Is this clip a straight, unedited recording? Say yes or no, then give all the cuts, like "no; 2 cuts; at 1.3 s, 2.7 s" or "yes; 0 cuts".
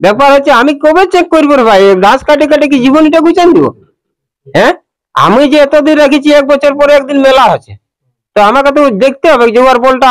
yes; 0 cuts